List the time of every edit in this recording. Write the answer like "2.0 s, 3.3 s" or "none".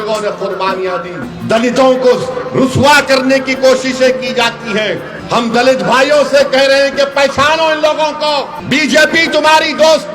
1.3 s, 5.1 s, 8.6 s